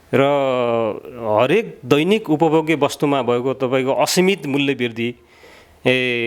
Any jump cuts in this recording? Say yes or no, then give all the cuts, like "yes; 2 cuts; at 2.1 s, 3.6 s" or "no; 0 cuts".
no; 0 cuts